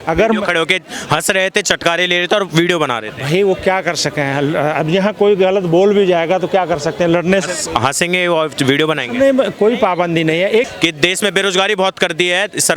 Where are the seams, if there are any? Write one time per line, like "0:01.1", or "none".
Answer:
0:10.7